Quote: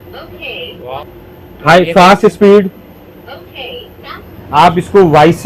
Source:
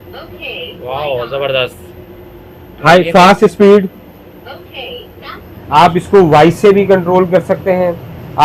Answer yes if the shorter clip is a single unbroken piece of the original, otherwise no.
no